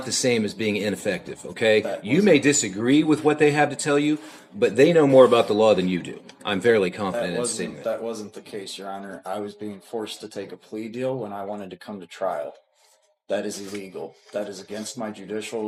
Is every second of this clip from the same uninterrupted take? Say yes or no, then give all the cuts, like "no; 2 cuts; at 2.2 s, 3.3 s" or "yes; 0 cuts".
yes; 0 cuts